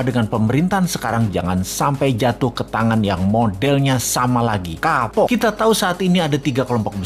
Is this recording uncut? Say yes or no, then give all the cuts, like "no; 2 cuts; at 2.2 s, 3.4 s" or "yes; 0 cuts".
no; 1 cut; at 5.3 s